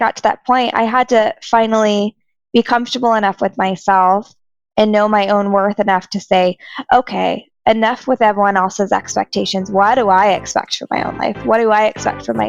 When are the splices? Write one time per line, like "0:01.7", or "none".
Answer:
none

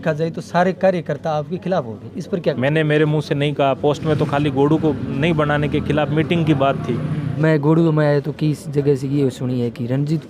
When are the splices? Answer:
0:02.6
0:07.3

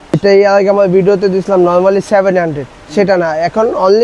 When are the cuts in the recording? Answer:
none

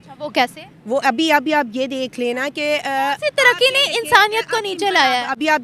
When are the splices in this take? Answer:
none

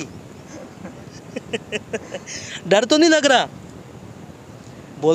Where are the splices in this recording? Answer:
none

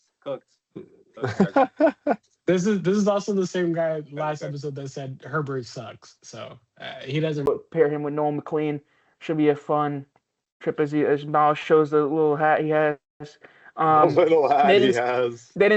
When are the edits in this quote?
0:07.5

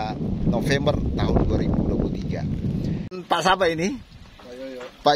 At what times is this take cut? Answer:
0:03.1

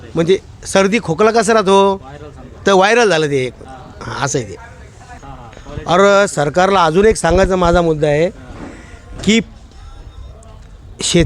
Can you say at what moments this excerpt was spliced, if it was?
0:05.2

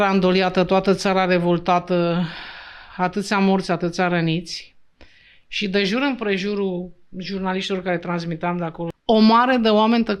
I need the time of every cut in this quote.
0:08.9

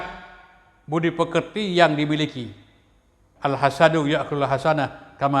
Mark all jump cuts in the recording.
0:03.2

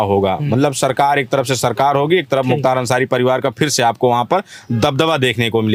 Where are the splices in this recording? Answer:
none

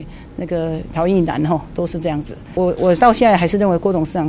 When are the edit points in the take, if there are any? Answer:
0:02.5

